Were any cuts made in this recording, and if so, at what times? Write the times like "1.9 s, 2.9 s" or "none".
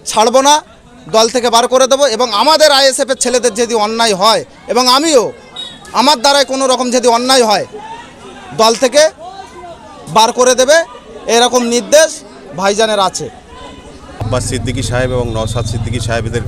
14.1 s